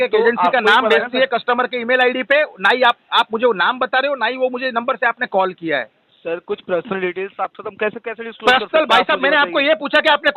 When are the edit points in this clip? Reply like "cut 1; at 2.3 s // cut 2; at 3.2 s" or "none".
none